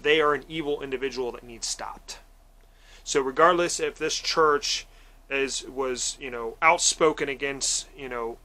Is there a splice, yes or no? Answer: no